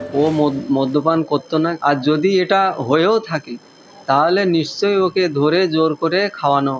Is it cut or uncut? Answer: cut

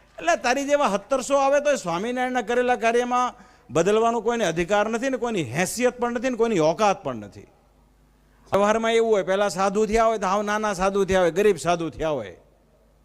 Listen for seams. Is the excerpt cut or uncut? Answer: cut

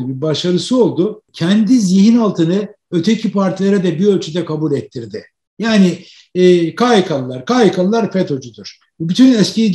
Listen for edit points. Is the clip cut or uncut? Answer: cut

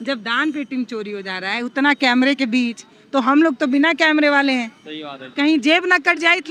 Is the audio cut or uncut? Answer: uncut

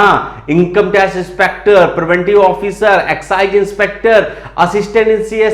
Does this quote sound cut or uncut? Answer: uncut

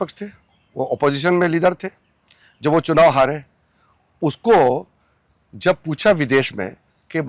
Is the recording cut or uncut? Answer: uncut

